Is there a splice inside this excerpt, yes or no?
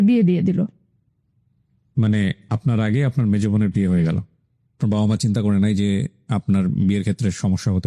no